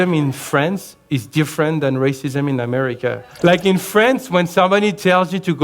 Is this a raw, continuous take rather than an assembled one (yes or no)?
no